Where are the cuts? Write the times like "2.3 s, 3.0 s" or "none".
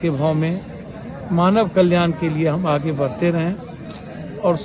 none